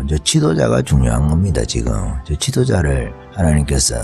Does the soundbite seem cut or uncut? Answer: uncut